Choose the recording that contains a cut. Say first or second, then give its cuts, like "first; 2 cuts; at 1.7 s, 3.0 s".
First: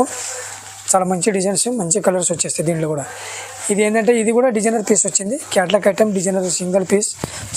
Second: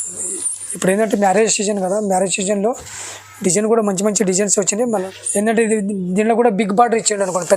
second; 1 cut; at 5.1 s